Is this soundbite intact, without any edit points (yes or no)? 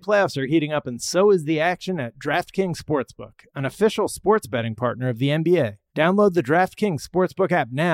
no